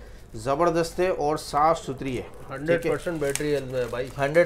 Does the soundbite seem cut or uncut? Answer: uncut